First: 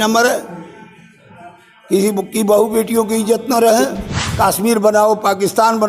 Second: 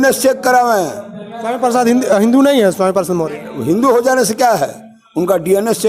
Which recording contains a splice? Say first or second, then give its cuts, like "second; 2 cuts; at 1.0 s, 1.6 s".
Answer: first; 1 cut; at 4.2 s